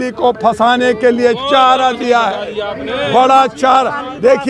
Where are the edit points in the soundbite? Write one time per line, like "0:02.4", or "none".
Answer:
none